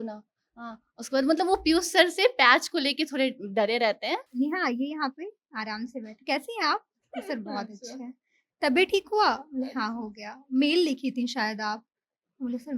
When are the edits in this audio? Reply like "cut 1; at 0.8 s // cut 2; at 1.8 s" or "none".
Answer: cut 1; at 4.3 s